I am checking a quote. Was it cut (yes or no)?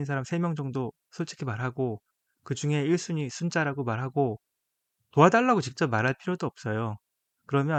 no